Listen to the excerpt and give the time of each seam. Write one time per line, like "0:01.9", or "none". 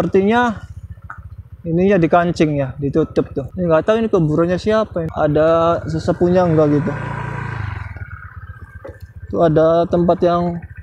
0:03.4
0:05.1